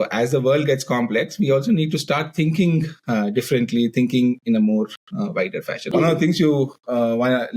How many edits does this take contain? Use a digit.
1